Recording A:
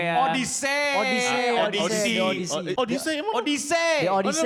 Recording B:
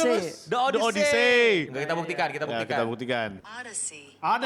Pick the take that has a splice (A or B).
B